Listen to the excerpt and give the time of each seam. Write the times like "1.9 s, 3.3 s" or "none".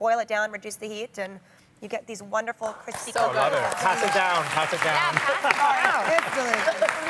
3.5 s